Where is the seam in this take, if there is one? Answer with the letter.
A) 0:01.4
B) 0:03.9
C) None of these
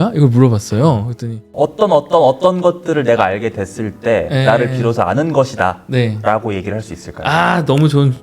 A